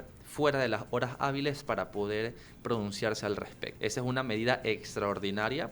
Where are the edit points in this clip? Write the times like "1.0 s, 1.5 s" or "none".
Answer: 3.6 s